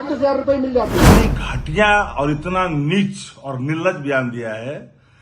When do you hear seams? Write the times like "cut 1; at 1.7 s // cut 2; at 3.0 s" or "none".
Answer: cut 1; at 1.1 s